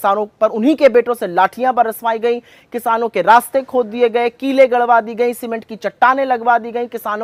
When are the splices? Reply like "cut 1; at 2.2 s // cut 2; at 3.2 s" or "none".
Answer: none